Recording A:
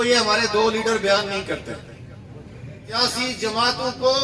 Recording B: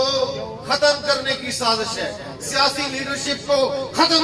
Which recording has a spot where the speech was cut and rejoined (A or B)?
A